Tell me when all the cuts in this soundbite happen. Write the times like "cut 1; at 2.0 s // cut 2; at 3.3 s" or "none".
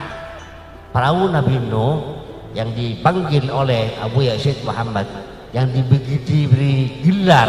none